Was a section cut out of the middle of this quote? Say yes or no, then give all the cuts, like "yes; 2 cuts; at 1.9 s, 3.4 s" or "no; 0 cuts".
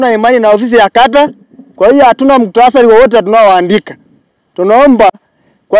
no; 0 cuts